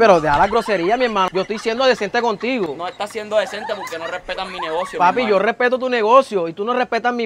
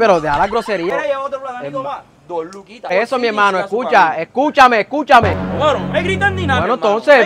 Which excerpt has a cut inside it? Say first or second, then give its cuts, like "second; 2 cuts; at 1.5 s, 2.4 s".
second; 1 cut; at 0.9 s